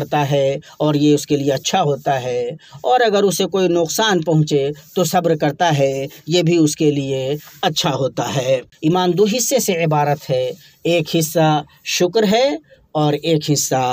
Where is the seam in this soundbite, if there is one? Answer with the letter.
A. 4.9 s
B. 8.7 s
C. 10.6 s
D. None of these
B